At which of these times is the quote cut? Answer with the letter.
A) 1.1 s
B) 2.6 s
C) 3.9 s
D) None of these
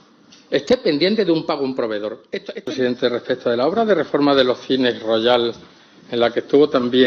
B